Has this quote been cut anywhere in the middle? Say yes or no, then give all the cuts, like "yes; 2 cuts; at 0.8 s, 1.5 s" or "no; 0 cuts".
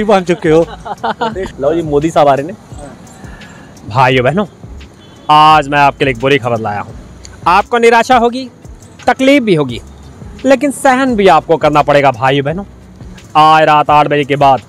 yes; 1 cut; at 1.4 s